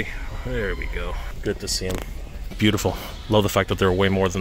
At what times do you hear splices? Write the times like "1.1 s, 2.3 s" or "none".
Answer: 1.3 s, 2.5 s